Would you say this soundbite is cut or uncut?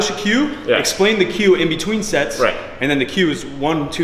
uncut